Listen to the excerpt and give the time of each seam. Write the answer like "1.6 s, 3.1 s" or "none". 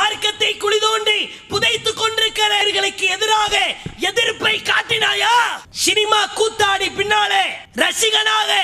2.6 s, 5.7 s, 7.6 s